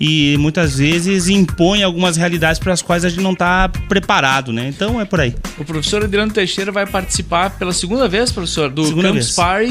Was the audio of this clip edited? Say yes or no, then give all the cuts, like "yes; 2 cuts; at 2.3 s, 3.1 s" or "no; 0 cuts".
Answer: yes; 1 cut; at 2.9 s